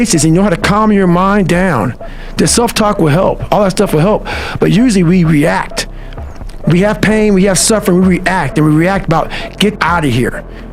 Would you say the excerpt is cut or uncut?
cut